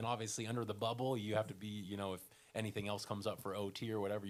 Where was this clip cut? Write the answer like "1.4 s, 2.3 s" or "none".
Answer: none